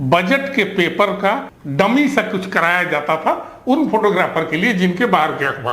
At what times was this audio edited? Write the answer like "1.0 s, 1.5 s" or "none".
1.6 s